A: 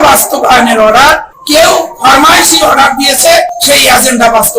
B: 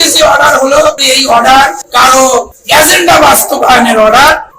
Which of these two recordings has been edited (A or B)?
B